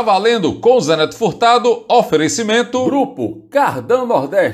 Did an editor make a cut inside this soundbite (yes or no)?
yes